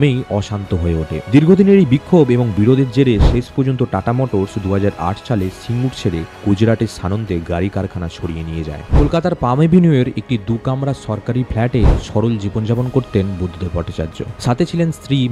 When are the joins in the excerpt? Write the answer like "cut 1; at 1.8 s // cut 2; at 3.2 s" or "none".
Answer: cut 1; at 9.0 s